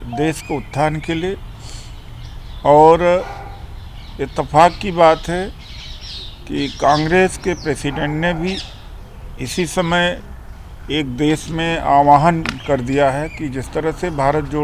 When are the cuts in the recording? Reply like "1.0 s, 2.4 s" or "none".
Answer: none